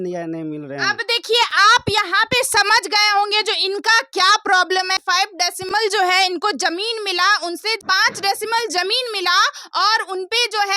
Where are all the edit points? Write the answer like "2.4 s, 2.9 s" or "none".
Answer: none